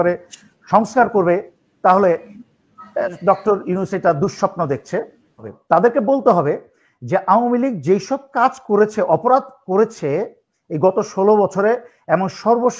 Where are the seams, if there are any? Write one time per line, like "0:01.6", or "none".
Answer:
0:05.4